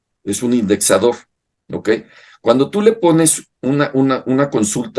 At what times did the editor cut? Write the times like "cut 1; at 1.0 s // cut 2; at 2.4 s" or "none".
none